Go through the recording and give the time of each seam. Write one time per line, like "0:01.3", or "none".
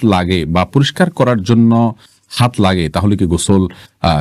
none